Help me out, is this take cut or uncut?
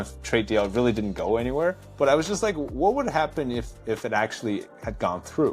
cut